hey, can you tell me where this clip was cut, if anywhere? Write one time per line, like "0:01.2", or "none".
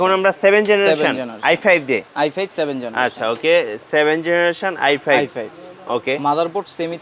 none